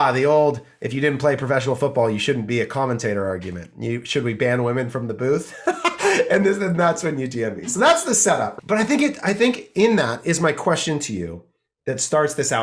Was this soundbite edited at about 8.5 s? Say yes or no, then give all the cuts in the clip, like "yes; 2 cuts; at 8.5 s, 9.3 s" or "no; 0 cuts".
yes; 1 cut; at 8.5 s